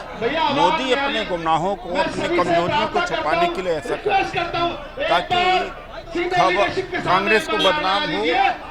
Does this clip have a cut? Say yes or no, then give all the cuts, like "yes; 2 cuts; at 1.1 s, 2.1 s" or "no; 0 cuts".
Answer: no; 0 cuts